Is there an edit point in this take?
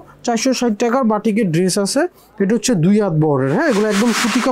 no; 0 cuts

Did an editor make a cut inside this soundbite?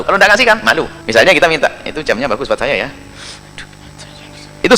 yes; 1 cut; at 1.0 s

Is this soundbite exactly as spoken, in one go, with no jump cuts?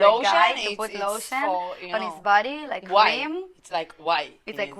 yes; 0 cuts

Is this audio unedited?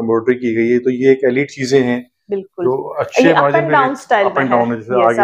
yes; 0 cuts

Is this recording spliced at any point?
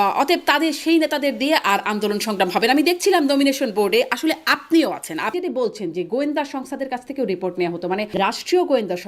yes; 2 cuts; at 5.4 s, 8.2 s

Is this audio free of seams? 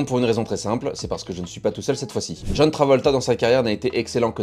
yes; 0 cuts

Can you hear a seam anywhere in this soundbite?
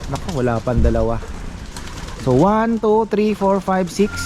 no; 0 cuts

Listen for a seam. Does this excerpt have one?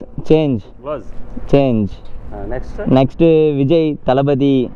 no; 0 cuts

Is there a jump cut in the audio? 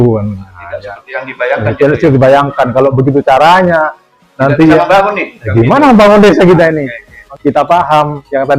yes; 1 cut; at 7.2 s

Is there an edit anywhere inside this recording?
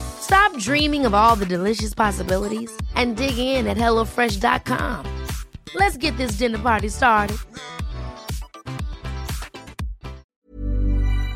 yes; 1 cut; at 10.2 s

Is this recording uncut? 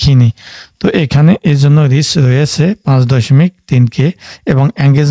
yes; 0 cuts

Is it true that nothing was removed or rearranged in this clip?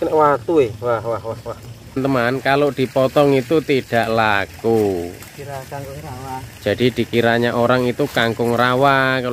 no; 1 cut; at 2.0 s

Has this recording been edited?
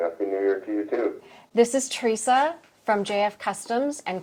no; 0 cuts

